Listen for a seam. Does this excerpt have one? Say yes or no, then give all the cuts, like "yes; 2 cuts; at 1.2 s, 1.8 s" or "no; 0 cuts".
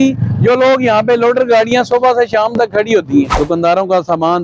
yes; 1 cut; at 3.3 s